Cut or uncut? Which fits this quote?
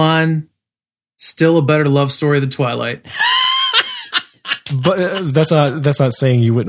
cut